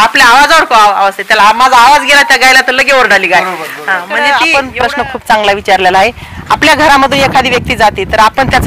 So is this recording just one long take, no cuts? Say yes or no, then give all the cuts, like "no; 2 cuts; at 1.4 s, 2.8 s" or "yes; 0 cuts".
no; 1 cut; at 4.0 s